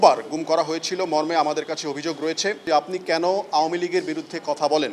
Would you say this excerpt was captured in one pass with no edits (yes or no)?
no